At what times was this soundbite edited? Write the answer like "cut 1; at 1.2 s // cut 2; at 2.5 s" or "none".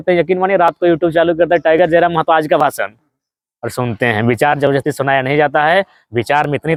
none

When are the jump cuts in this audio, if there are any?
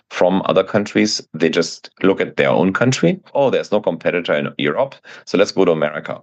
cut 1; at 3.3 s

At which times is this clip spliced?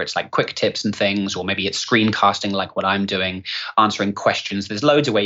none

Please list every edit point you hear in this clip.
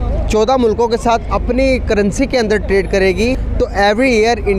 cut 1; at 3.4 s

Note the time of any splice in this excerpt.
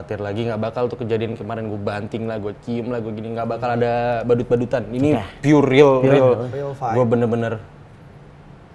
none

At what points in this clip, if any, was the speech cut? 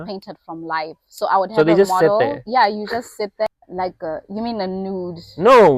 cut 1; at 3.5 s

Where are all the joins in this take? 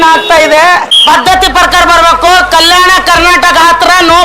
cut 1; at 0.9 s

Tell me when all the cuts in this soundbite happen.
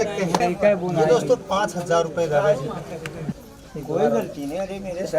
cut 1; at 3.4 s

